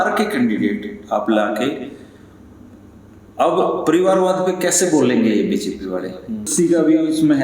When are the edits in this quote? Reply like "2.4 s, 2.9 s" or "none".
6.5 s